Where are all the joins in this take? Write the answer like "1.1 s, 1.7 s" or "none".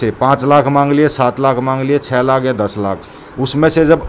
none